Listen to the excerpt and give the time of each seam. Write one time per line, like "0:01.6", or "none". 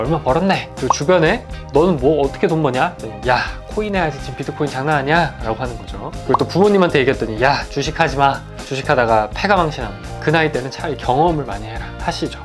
none